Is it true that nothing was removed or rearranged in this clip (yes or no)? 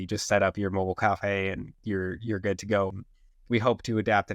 no